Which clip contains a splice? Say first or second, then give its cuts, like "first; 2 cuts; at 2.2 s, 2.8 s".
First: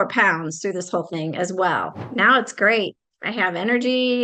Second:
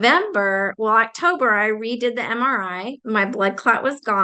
first; 1 cut; at 2.0 s